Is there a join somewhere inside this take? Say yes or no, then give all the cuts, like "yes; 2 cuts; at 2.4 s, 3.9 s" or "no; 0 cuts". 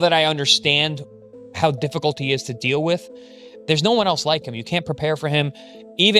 no; 0 cuts